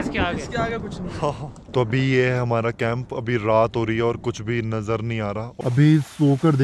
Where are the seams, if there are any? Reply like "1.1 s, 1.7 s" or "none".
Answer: 1.6 s, 5.5 s